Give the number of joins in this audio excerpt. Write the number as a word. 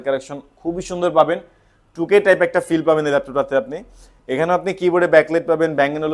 zero